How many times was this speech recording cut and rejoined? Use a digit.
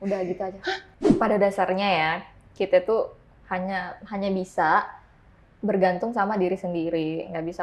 1